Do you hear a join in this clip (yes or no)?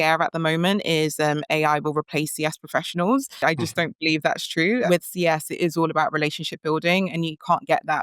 yes